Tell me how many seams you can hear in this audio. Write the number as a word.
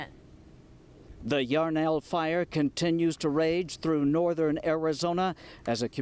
one